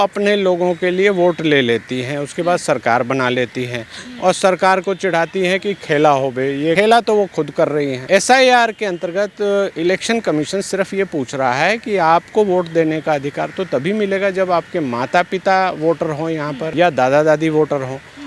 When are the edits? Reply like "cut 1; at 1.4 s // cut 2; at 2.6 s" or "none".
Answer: cut 1; at 6.8 s // cut 2; at 8.0 s // cut 3; at 16.6 s

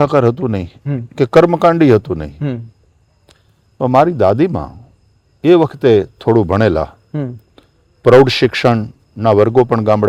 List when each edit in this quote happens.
none

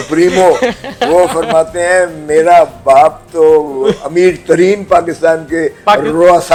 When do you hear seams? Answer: none

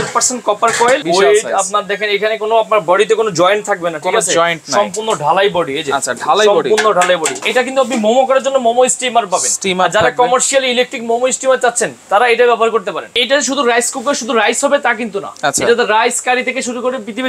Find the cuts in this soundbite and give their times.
cut 1; at 1.0 s // cut 2; at 7.4 s // cut 3; at 13.2 s

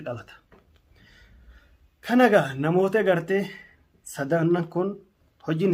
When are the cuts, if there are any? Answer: none

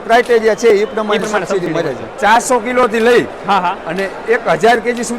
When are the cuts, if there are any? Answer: cut 1; at 2.1 s

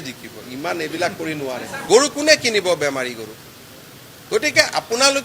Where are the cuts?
cut 1; at 1.8 s

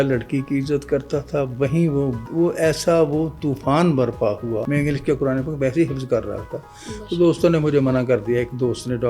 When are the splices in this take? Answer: cut 1; at 4.6 s

